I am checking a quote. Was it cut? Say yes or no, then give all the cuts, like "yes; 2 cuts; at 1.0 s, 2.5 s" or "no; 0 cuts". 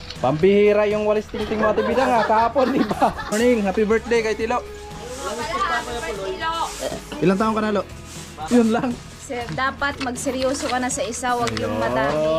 yes; 2 cuts; at 3.3 s, 8.3 s